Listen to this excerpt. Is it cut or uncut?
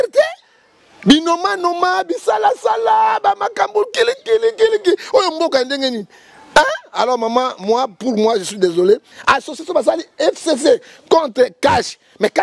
cut